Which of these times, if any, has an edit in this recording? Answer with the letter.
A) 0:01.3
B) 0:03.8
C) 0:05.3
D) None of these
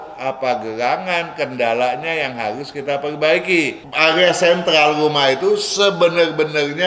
B